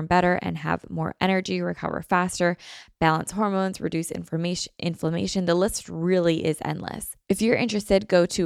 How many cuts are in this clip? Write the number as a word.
one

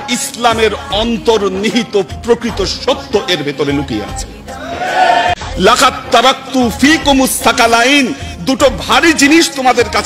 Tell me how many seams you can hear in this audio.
one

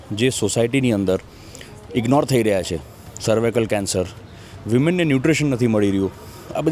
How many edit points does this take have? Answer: zero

